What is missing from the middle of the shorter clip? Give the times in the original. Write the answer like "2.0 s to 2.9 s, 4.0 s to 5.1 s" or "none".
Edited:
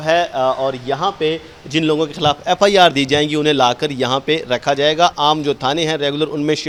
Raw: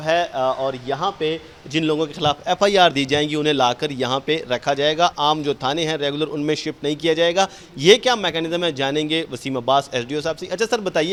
none